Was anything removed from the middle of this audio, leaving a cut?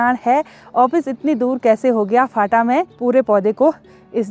yes; 1 cut; at 2.9 s

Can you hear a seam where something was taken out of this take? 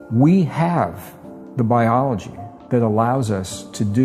no; 0 cuts

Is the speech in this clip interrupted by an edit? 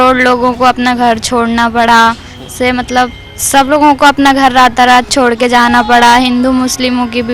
no; 0 cuts

